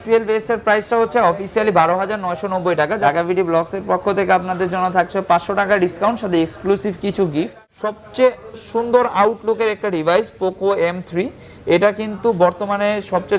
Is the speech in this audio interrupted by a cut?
yes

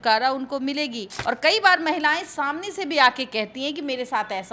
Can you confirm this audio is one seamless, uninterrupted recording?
no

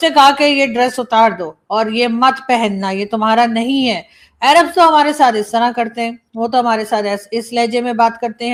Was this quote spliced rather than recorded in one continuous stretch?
no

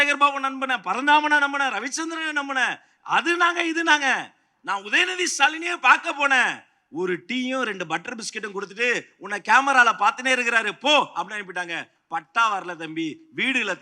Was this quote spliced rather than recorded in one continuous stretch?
no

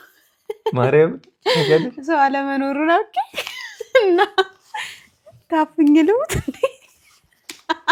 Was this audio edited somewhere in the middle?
no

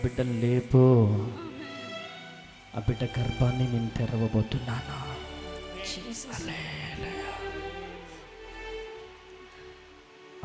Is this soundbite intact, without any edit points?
yes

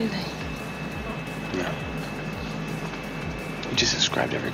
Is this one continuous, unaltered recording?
yes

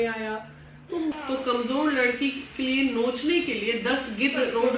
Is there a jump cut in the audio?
yes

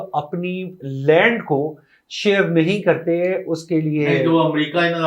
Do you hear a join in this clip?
no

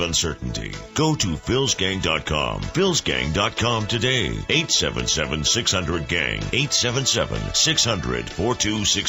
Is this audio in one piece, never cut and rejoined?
yes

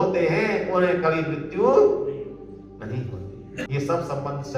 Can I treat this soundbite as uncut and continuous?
no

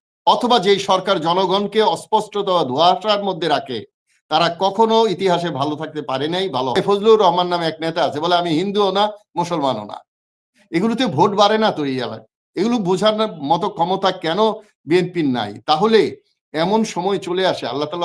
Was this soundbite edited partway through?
yes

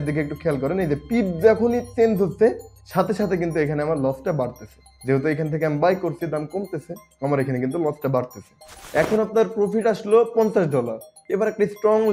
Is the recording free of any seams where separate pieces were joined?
no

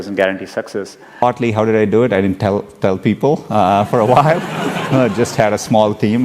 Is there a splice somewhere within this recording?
yes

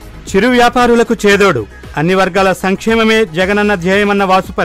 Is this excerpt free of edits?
yes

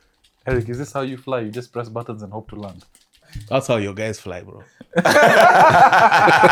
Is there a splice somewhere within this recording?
no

